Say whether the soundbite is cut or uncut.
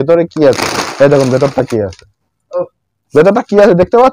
uncut